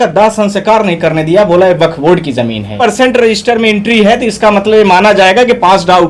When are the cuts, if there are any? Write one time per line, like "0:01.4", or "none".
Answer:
0:02.8